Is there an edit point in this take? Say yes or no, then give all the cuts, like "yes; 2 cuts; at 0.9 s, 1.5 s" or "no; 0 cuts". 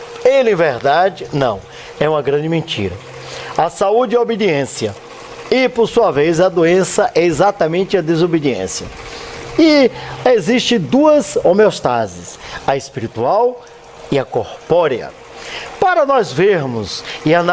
yes; 1 cut; at 4.7 s